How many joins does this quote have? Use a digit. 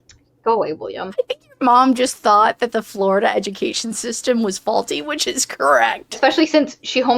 2